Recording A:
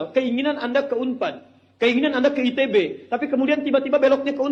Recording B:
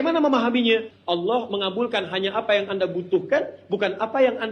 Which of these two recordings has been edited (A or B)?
B